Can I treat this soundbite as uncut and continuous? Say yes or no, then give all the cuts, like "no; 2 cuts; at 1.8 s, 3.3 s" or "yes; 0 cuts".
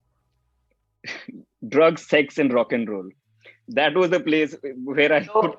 yes; 0 cuts